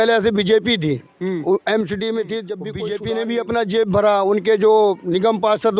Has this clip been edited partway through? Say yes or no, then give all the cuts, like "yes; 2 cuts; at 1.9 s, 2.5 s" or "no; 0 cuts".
yes; 1 cut; at 2.8 s